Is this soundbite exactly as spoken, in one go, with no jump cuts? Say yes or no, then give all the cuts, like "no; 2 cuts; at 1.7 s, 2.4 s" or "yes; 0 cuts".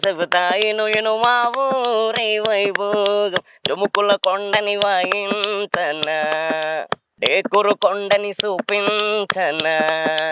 no; 1 cut; at 7.1 s